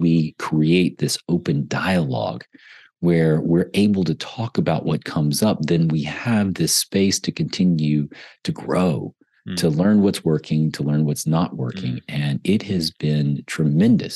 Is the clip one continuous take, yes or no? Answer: yes